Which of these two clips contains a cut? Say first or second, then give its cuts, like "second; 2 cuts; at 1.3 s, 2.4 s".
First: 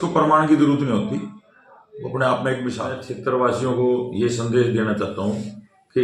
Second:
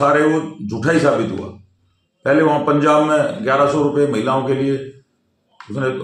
first; 1 cut; at 2.7 s